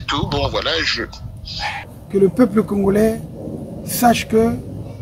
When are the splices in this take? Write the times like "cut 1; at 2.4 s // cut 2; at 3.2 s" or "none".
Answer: cut 1; at 1.9 s

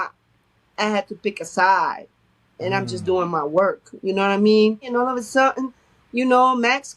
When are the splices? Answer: cut 1; at 4.9 s

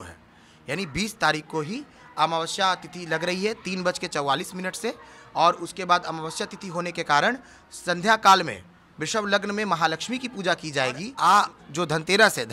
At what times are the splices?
cut 1; at 11.1 s

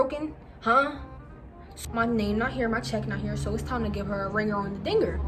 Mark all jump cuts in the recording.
cut 1; at 1.7 s

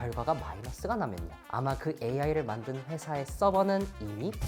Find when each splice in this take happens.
cut 1; at 1.2 s

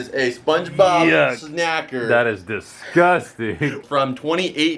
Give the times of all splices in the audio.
cut 1; at 3.8 s

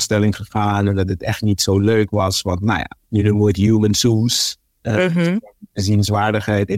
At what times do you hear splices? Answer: cut 1; at 2.9 s

